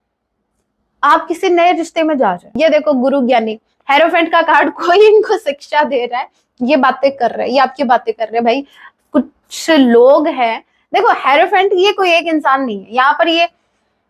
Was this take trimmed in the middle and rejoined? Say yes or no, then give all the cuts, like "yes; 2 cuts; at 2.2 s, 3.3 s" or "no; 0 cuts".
yes; 1 cut; at 2.5 s